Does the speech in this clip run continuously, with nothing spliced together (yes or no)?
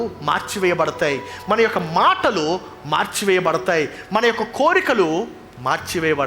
yes